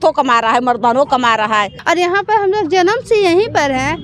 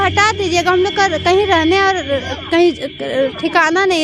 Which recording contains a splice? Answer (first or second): first